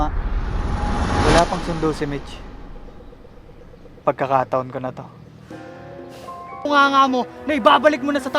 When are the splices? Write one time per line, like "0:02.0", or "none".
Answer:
0:06.6